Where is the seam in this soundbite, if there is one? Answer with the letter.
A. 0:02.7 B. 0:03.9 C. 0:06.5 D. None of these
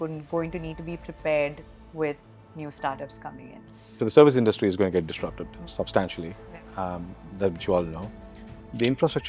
B